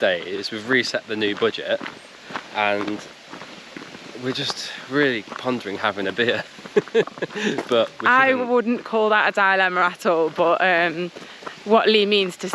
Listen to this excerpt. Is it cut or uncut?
uncut